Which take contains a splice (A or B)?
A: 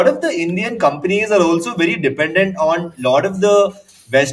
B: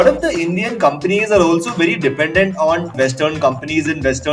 B